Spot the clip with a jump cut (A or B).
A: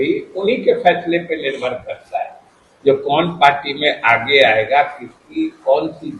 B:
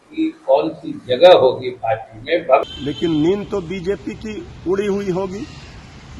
B